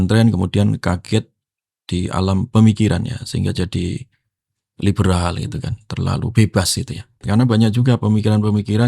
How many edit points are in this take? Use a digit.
1